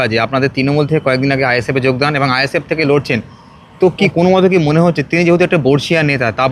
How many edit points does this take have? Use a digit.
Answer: 1